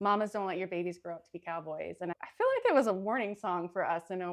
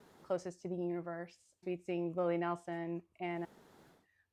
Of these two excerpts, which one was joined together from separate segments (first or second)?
second